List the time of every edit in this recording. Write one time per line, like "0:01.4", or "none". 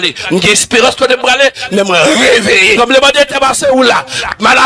0:02.8